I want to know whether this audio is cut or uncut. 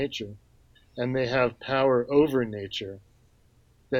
uncut